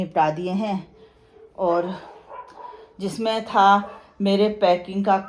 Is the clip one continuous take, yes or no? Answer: yes